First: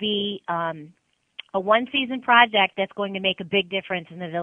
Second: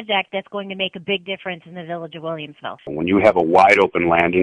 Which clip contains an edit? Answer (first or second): second